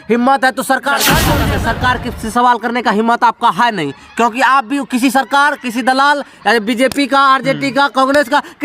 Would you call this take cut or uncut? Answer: cut